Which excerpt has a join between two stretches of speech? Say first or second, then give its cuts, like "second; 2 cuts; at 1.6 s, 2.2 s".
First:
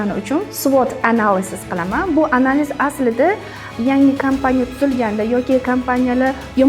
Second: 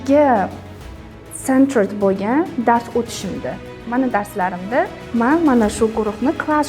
second; 2 cuts; at 3.7 s, 5.0 s